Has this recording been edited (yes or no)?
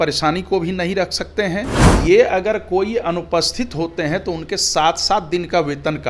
yes